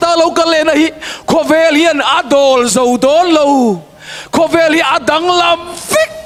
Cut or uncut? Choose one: uncut